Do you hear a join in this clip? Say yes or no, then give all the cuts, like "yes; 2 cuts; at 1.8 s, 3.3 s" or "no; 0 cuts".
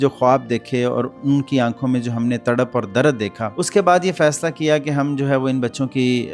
yes; 1 cut; at 3.4 s